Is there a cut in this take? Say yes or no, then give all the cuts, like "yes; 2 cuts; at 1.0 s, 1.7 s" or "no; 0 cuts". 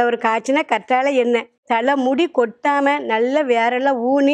yes; 1 cut; at 1.6 s